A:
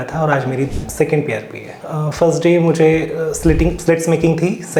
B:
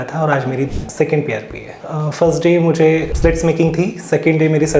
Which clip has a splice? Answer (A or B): B